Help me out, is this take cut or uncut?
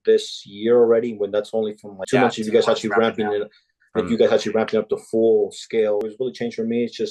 cut